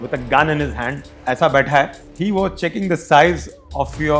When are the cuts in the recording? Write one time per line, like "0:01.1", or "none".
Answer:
0:02.0